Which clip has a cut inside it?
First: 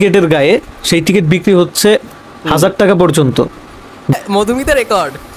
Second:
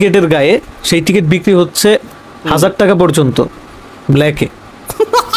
first; 1 cut; at 4.1 s

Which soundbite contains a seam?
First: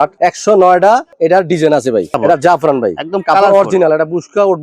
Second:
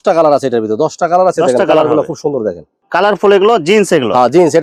first; 1 cut; at 2.2 s

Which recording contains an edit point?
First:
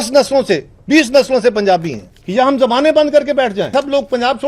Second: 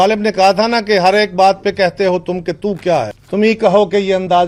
first; 2 cuts; at 2.1 s, 3.7 s

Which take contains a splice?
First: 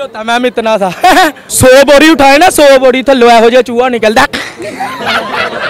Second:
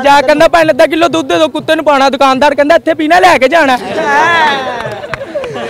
first; 1 cut; at 1.4 s

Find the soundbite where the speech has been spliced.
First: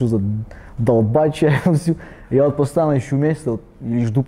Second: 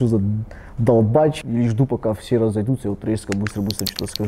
second; 1 cut; at 1.3 s

